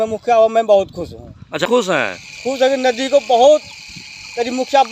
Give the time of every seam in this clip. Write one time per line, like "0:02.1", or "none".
0:01.7